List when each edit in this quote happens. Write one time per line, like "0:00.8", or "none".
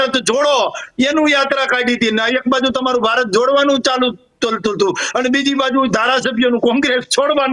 none